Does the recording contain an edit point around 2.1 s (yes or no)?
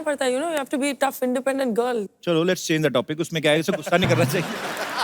yes